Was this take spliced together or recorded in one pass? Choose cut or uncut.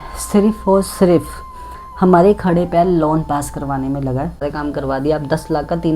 cut